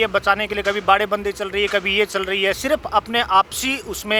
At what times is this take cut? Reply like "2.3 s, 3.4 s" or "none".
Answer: none